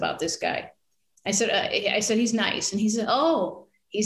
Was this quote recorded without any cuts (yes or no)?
yes